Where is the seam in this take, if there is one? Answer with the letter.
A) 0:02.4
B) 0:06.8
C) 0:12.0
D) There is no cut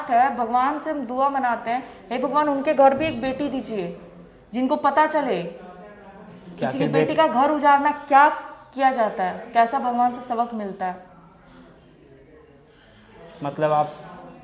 D